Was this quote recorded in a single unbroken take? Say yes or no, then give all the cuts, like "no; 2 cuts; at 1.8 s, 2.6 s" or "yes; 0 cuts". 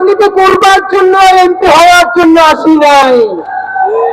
yes; 0 cuts